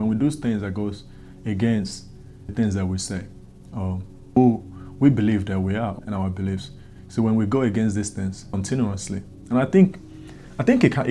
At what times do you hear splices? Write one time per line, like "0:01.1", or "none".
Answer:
0:02.5
0:04.4
0:06.0
0:08.5